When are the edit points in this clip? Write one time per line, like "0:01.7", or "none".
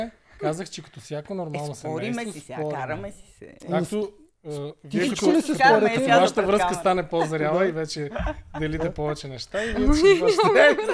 none